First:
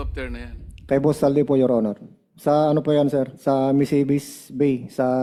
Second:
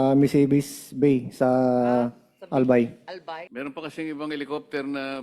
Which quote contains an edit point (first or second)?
second